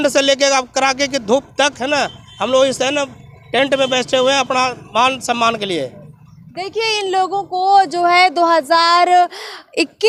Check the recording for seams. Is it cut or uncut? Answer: uncut